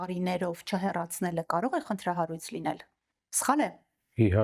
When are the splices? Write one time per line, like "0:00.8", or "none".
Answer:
none